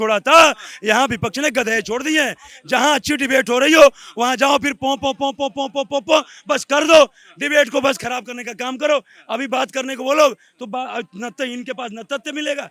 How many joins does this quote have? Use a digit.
0